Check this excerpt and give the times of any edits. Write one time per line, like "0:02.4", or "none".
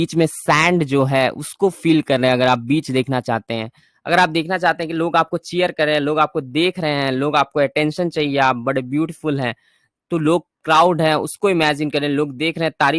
none

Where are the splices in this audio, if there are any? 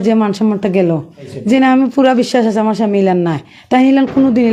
0:01.2

